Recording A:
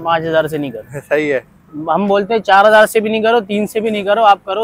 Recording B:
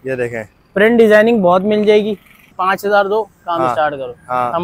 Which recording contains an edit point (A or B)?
B